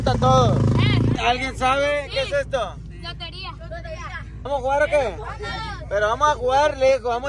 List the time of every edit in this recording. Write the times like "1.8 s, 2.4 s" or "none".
1.2 s, 4.5 s